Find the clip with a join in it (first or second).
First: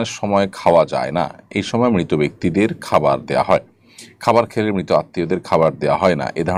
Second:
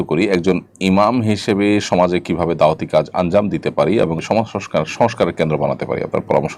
second